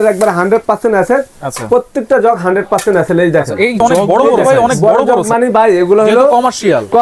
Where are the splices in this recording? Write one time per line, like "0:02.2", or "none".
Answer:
0:04.8